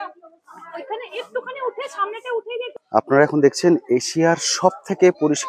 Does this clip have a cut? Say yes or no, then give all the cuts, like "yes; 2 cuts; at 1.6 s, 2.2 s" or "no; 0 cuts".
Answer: yes; 1 cut; at 2.7 s